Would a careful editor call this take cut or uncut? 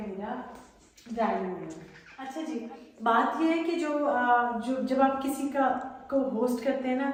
uncut